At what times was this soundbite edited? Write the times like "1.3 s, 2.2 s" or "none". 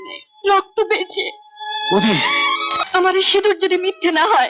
2.7 s